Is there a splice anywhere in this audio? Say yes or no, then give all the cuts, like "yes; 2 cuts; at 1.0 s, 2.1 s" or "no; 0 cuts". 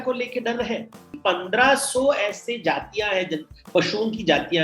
yes; 1 cut; at 1.2 s